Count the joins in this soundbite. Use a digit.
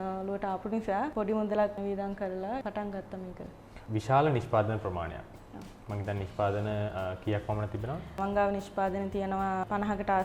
2